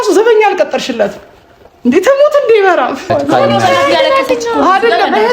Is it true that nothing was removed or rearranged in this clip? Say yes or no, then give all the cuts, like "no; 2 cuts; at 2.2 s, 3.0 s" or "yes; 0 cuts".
no; 1 cut; at 3.1 s